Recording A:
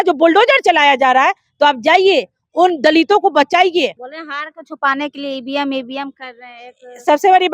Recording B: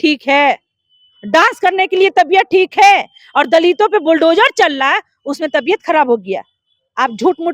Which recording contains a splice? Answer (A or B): A